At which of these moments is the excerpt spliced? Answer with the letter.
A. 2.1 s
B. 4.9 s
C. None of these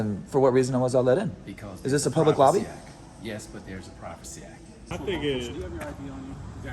B